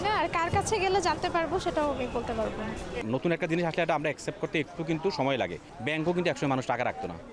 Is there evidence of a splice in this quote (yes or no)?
yes